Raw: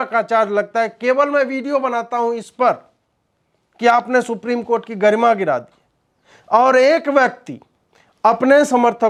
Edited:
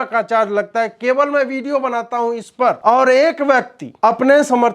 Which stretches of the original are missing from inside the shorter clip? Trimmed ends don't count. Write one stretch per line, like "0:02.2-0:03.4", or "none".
0:02.8-0:06.5
0:07.5-0:08.0